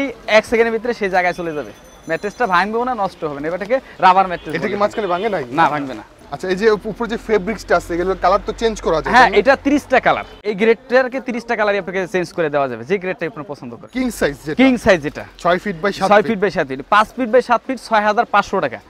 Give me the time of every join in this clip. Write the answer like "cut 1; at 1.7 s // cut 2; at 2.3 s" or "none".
none